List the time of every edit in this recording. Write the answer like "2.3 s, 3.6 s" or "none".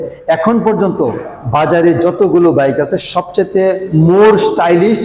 none